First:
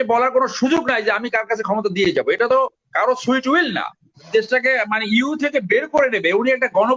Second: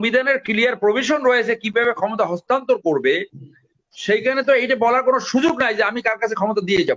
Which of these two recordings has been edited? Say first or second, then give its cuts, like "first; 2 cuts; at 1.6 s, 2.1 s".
first; 1 cut; at 4.1 s